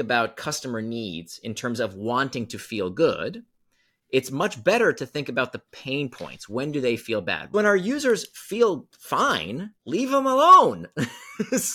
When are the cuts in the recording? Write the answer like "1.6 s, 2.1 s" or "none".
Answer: 7.5 s